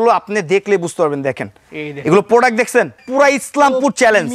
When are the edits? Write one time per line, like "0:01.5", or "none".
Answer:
0:03.0